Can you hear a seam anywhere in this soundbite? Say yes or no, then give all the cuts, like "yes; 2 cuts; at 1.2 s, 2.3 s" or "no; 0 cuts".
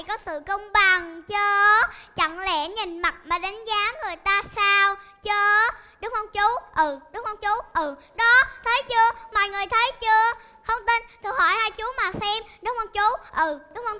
no; 0 cuts